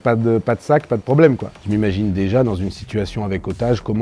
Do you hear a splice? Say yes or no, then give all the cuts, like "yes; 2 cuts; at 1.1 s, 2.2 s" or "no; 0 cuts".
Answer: yes; 1 cut; at 1.5 s